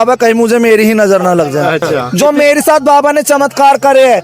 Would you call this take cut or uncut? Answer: cut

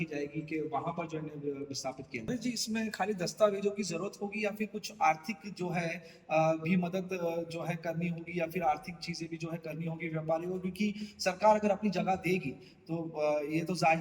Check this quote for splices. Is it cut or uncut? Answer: cut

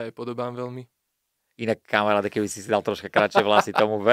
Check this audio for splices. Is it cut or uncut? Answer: uncut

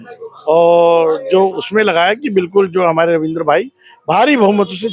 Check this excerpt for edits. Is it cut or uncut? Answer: uncut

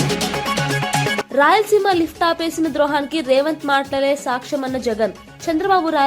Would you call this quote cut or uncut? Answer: cut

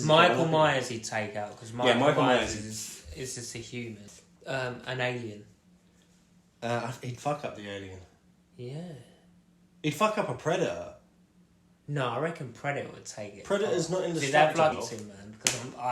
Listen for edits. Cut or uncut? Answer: cut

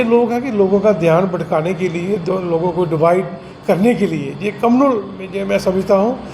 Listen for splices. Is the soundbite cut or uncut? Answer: uncut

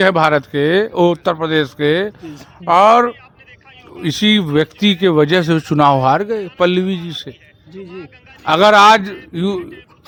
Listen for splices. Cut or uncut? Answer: uncut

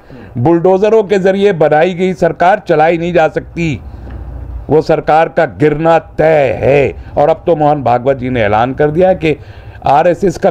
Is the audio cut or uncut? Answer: uncut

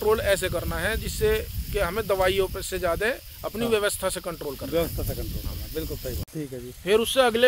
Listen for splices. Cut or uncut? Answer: cut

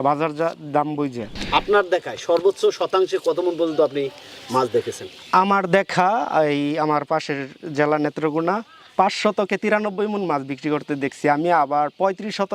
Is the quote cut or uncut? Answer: cut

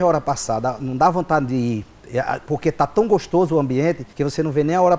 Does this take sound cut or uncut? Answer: cut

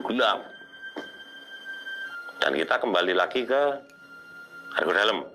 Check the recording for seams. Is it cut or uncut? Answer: uncut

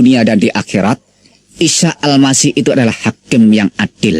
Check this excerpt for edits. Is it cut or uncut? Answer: uncut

